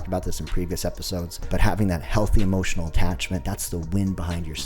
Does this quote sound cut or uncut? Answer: cut